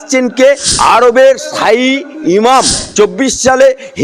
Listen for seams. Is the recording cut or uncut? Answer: cut